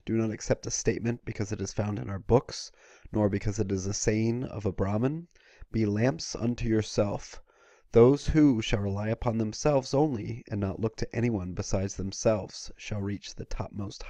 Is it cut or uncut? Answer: uncut